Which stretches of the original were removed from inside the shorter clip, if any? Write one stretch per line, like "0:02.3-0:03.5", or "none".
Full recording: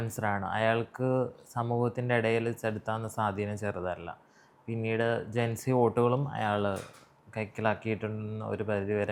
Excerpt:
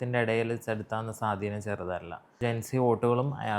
0:04.3-0:05.3